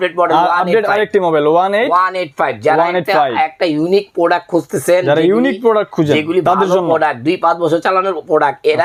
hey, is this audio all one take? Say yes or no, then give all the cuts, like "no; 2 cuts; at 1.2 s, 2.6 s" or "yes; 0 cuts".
yes; 0 cuts